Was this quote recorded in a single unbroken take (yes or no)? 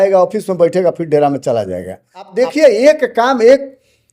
no